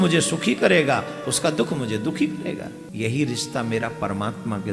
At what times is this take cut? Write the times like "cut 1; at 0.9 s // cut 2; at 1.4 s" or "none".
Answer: cut 1; at 2.8 s